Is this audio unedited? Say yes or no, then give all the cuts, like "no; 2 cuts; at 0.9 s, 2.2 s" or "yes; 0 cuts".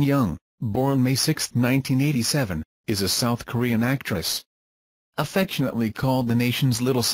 yes; 0 cuts